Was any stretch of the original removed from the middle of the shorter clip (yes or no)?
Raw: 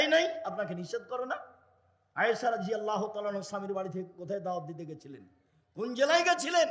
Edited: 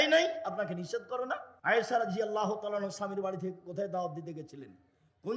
yes